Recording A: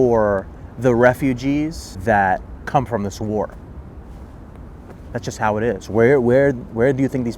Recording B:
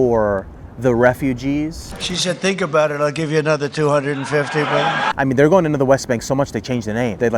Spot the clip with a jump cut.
B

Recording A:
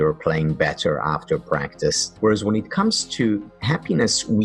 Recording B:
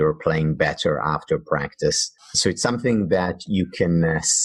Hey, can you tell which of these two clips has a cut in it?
A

